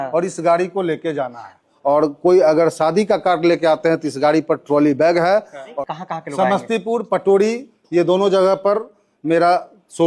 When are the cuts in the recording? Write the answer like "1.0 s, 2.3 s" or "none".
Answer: 1.7 s, 5.7 s